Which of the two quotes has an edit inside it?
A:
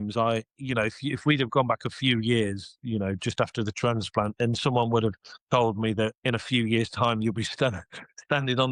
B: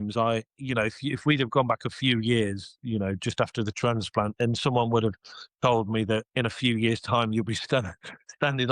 A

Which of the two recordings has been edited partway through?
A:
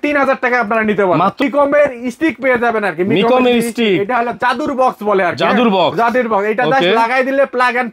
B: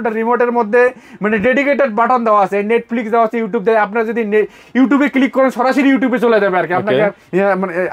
A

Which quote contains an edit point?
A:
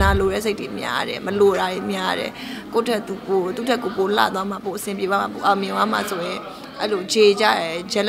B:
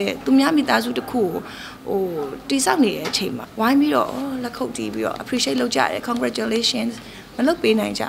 B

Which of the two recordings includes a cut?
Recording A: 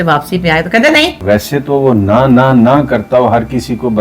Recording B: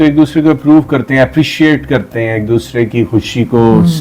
A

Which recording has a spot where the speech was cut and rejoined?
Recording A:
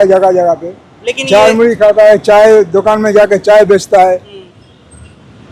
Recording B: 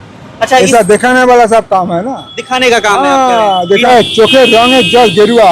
B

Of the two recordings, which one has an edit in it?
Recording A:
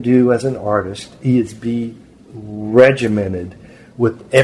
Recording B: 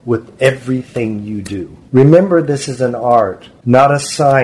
B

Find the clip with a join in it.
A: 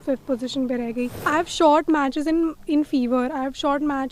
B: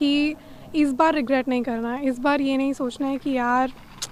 A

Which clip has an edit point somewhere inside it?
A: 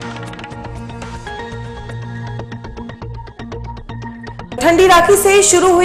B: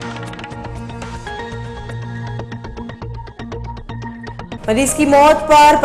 A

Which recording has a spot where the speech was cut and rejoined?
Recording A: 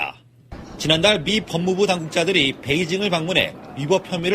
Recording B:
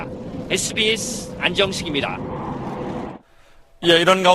B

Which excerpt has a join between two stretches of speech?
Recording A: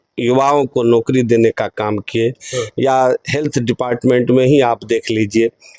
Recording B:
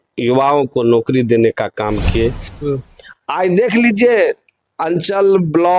B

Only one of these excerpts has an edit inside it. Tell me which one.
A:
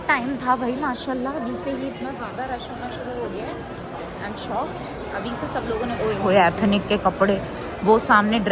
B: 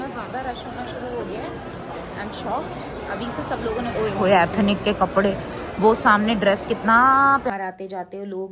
B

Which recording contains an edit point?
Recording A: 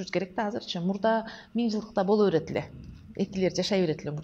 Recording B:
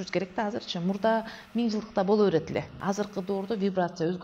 B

